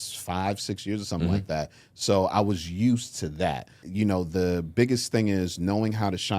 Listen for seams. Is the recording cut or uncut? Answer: cut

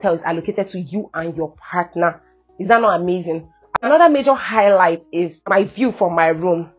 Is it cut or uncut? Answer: cut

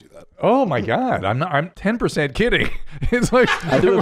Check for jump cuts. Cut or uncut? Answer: cut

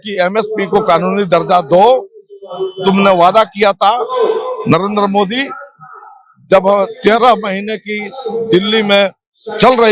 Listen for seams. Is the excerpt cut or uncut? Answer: uncut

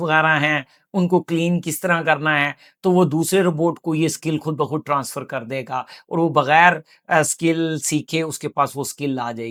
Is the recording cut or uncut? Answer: uncut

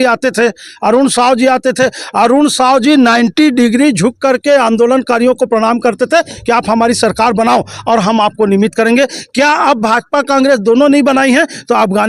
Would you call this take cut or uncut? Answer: uncut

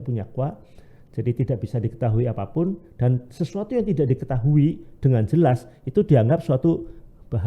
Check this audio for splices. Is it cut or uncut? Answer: uncut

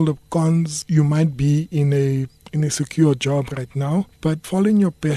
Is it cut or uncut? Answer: uncut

